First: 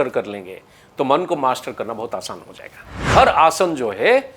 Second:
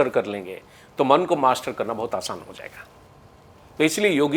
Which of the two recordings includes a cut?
first; 1 cut; at 3.1 s

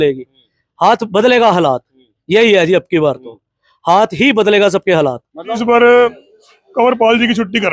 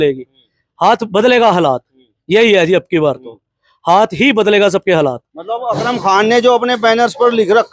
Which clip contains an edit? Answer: first; 1 cut; at 5.6 s

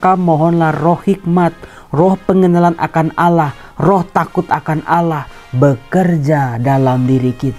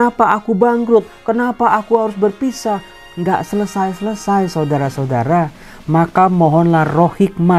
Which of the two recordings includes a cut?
second; 1 cut; at 2.9 s

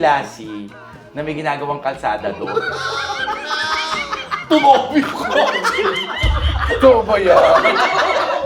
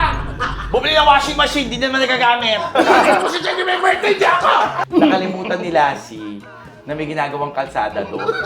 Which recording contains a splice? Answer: second; 1 cut; at 4.8 s

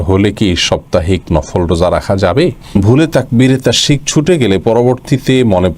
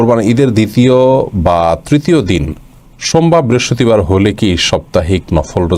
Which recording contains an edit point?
first; 1 cut; at 2.8 s

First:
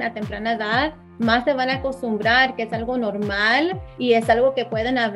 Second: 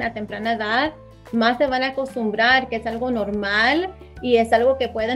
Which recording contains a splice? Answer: first; 2 cuts; at 1.0 s, 3.9 s

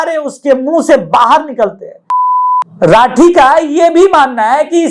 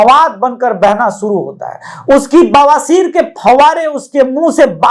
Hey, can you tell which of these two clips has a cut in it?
first; 1 cut; at 2.2 s

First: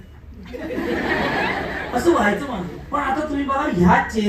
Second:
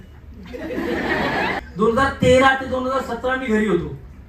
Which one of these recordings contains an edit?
second; 1 cut; at 1.6 s

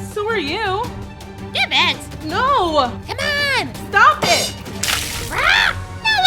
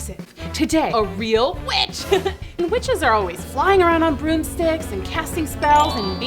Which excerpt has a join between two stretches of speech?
second; 2 cuts; at 0.9 s, 2.6 s

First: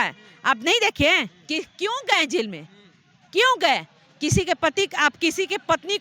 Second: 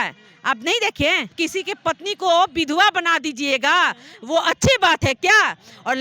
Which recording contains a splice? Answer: second; 1 cut; at 1.3 s

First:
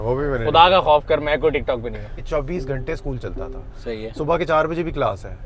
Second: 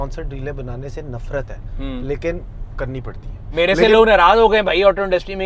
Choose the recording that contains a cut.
first; 1 cut; at 2.2 s

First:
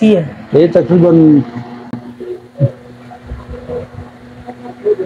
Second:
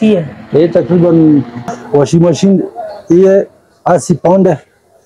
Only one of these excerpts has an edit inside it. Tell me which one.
second; 1 cut; at 1.8 s

